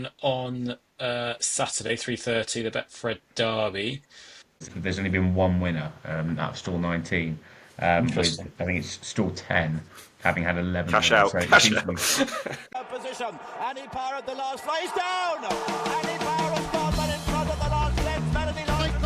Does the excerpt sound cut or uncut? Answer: cut